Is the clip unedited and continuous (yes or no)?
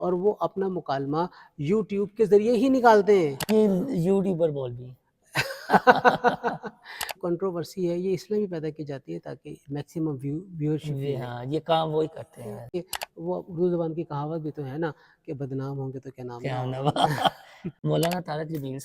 no